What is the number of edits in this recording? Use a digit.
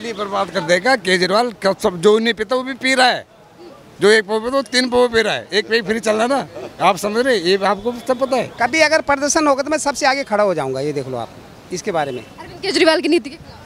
1